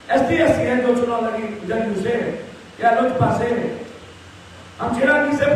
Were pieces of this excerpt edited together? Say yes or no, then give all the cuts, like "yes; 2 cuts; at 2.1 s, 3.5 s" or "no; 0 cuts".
no; 0 cuts